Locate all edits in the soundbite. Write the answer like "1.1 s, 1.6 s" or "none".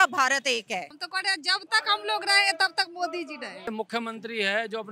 1.0 s, 3.7 s